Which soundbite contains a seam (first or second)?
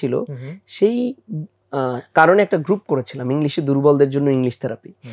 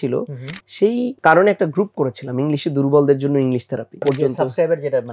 second